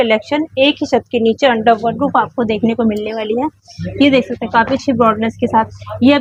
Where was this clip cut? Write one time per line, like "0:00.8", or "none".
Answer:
none

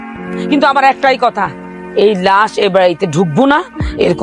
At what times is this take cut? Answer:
none

